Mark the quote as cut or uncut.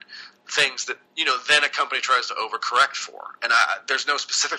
cut